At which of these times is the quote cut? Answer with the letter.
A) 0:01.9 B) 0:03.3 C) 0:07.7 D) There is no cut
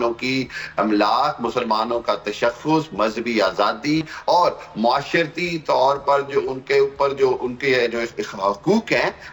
D